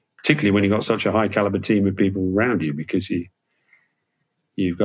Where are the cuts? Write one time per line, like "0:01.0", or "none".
none